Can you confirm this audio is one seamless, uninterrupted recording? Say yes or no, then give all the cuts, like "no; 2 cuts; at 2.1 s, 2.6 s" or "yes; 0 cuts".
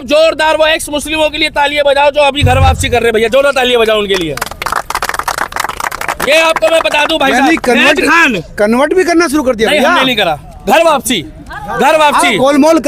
yes; 0 cuts